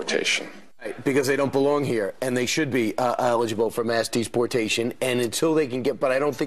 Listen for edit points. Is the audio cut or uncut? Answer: uncut